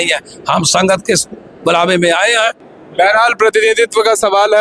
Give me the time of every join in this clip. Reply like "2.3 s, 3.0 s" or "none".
2.7 s

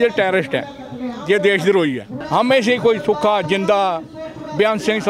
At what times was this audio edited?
2.1 s

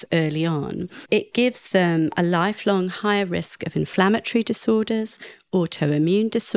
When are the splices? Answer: 0.9 s

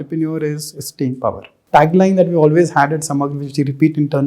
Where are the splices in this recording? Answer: 1.5 s

